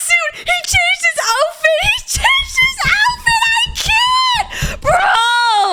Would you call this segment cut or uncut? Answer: uncut